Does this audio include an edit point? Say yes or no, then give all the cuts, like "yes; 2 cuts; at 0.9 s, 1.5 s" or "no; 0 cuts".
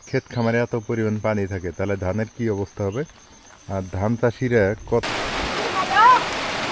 yes; 1 cut; at 5.1 s